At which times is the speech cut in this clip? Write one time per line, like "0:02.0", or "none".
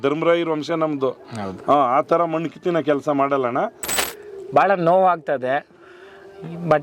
0:03.9